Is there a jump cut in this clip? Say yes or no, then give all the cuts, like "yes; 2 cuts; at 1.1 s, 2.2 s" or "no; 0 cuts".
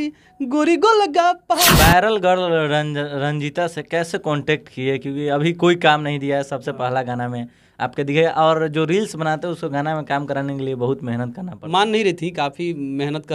yes; 2 cuts; at 1.7 s, 11.5 s